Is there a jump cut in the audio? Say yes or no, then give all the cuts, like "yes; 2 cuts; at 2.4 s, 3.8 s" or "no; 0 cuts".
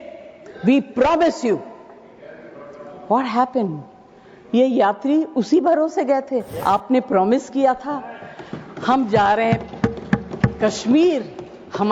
yes; 1 cut; at 6.5 s